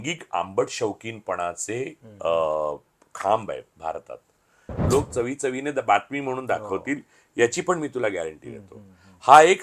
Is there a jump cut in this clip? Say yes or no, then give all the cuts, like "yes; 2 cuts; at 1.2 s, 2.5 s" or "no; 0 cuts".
yes; 1 cut; at 4.7 s